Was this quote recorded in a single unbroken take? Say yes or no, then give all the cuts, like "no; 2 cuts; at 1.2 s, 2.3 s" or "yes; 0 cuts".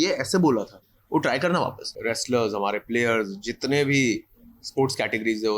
no; 1 cut; at 1.9 s